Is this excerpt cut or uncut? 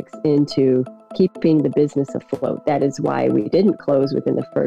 uncut